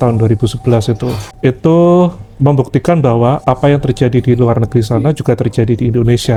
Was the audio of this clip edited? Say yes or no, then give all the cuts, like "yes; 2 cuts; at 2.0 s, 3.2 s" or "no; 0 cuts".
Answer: no; 0 cuts